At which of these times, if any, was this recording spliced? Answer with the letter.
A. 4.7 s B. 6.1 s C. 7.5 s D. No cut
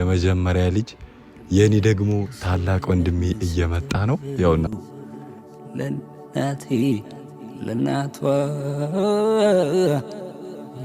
A